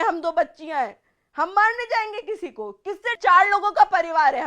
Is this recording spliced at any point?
yes; 1 cut; at 3.1 s

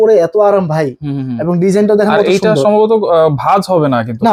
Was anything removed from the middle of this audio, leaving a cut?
no; 0 cuts

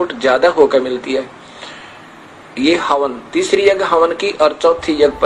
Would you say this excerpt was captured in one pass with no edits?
yes; 0 cuts

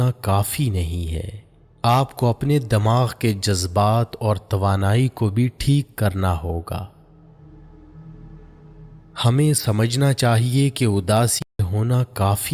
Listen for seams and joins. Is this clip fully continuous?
no; 1 cut; at 11.6 s

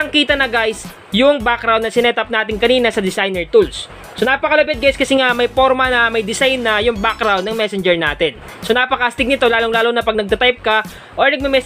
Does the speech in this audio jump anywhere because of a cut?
no; 0 cuts

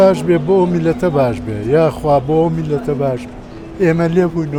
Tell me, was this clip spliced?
no; 0 cuts

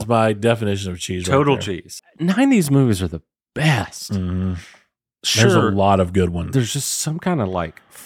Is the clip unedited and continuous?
no; 2 cuts; at 1.9 s, 6.4 s

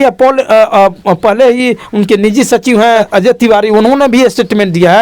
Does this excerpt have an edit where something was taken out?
yes; 1 cut; at 3.1 s

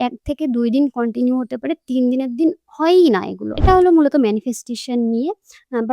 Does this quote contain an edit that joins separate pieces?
yes; 1 cut; at 3.5 s

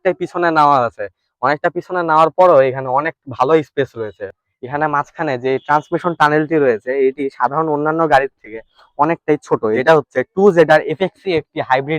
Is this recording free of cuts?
no; 2 cuts; at 4.2 s, 9.8 s

